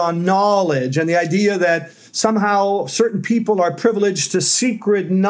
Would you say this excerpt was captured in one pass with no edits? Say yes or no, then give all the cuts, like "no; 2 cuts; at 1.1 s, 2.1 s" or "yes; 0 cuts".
yes; 0 cuts